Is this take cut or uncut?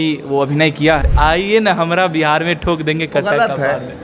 cut